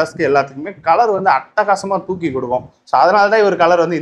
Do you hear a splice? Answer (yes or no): no